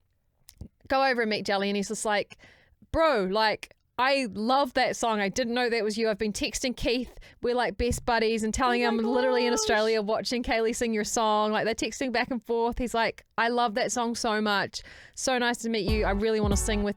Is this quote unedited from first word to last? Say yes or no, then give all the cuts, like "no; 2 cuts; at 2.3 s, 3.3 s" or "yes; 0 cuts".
yes; 0 cuts